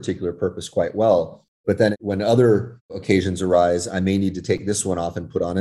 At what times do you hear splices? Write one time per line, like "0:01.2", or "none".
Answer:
0:01.7
0:03.0